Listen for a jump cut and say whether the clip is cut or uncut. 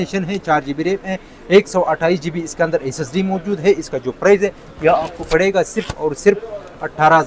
uncut